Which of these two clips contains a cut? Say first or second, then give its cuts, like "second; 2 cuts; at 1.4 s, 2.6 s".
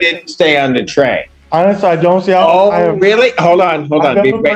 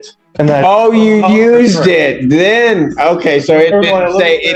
first; 1 cut; at 1.3 s